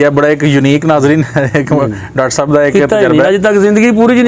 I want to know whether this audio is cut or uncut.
uncut